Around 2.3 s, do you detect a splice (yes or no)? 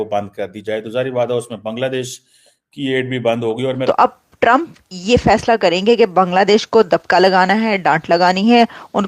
no